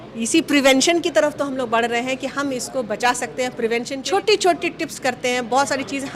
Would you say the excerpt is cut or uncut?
cut